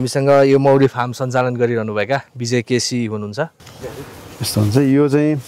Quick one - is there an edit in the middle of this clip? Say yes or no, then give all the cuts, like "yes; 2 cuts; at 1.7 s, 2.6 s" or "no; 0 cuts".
yes; 1 cut; at 3.8 s